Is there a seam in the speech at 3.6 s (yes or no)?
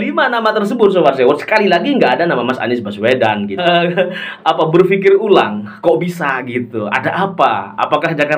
yes